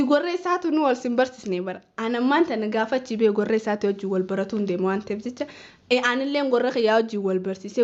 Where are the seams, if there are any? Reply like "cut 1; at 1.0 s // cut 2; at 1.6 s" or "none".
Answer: none